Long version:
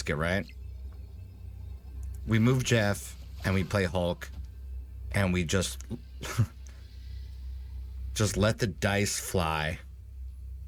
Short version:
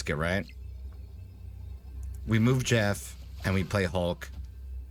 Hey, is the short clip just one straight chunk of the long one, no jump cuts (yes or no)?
yes